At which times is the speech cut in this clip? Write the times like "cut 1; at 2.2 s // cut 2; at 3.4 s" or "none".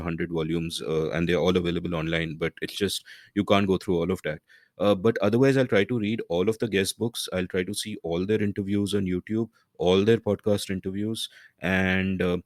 none